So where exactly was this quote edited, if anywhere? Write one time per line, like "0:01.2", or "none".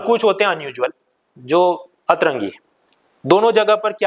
none

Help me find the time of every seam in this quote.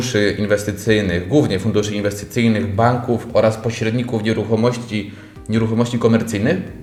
none

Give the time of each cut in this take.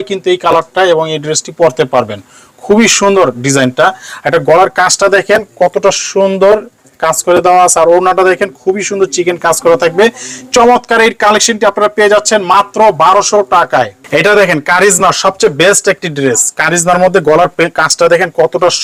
none

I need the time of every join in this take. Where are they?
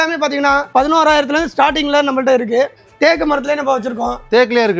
0:02.8

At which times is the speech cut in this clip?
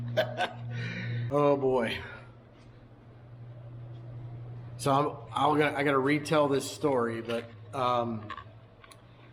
0:01.2

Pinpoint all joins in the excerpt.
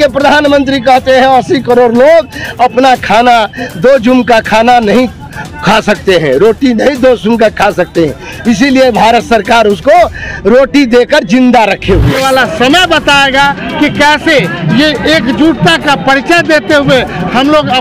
0:12.3

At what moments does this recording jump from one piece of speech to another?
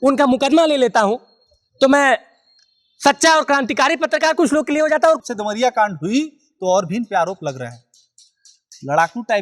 0:05.2

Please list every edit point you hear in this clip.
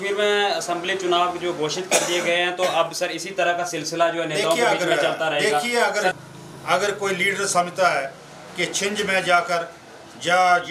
0:06.2

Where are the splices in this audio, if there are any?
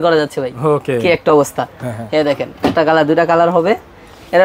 none

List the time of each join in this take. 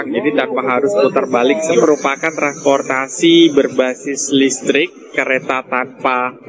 0:01.8

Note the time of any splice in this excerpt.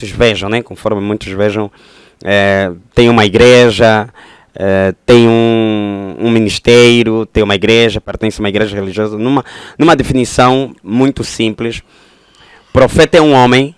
none

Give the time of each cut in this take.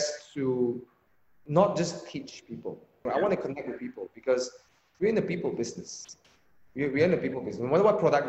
0:03.0

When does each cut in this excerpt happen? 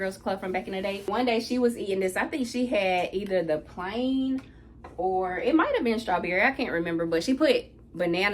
0:01.1

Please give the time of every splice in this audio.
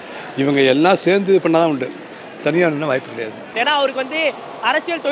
0:03.4

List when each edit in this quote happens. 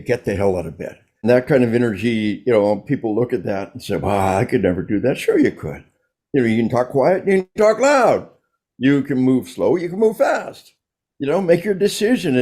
0:01.2

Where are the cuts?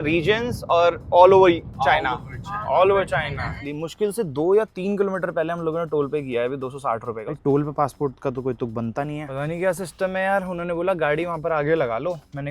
0:03.6
0:07.3
0:09.2

